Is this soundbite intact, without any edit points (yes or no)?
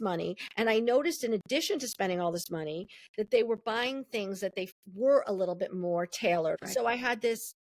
no